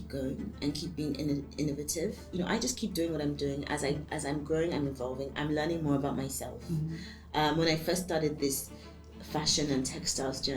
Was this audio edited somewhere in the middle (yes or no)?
yes